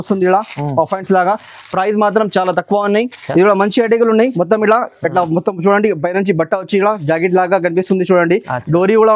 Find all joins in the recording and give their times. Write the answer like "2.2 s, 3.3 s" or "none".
3.2 s